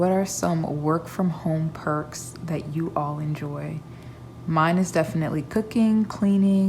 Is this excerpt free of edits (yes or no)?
yes